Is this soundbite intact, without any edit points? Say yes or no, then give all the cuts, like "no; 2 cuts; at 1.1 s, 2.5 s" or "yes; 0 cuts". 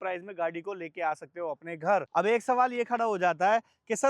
no; 1 cut; at 2.1 s